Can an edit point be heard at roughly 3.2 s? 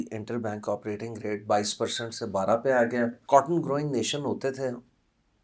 yes; 1 cut; at 3.2 s

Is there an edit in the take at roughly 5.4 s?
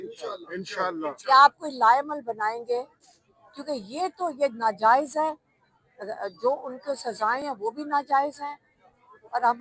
no; 0 cuts

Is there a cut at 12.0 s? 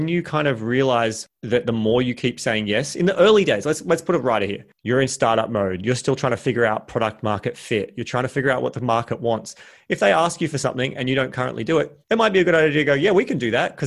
yes; 2 cuts; at 4.7 s, 12.0 s

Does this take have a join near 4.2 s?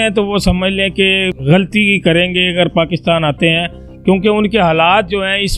no; 1 cut; at 1.4 s

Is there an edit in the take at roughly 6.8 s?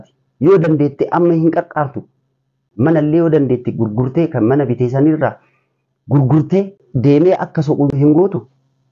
yes; 3 cuts; at 2.6 s, 6.8 s, 7.9 s

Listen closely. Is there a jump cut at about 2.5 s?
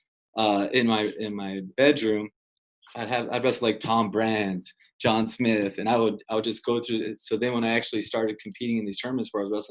yes; 1 cut; at 2.5 s

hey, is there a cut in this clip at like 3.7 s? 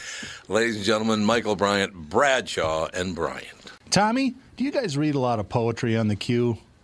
yes; 1 cut; at 3.7 s

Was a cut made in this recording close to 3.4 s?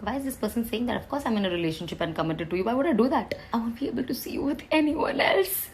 yes; 1 cut; at 3.4 s

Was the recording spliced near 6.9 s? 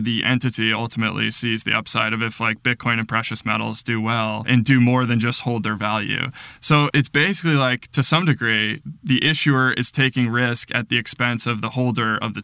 yes; 2 cuts; at 4.4 s, 6.9 s

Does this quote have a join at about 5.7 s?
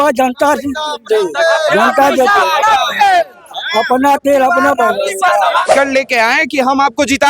yes; 1 cut; at 5.7 s

